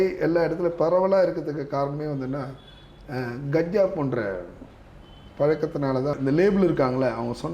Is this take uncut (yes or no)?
no